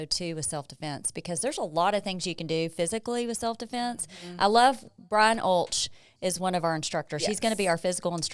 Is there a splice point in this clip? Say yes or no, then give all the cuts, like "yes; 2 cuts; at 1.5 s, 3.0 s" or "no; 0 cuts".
no; 0 cuts